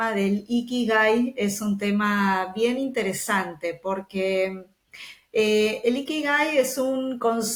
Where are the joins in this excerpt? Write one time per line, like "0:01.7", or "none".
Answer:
none